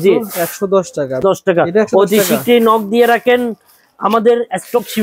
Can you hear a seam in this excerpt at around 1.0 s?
yes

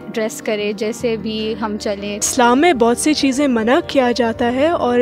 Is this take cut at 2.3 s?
yes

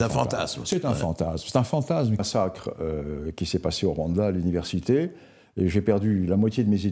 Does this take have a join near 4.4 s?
no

